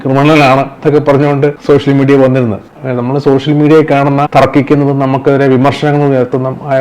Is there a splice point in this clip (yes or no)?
yes